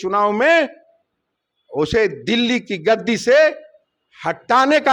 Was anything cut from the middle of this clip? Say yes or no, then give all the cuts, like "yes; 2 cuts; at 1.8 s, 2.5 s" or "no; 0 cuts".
no; 0 cuts